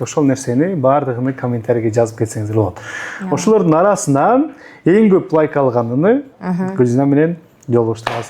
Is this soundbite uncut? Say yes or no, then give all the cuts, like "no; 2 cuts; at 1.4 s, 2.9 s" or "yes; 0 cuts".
no; 1 cut; at 6.3 s